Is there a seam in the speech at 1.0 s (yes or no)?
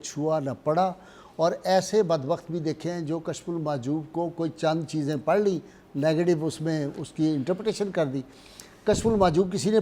no